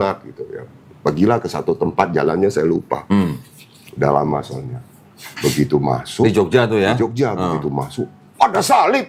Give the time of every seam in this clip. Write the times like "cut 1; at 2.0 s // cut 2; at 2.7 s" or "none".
none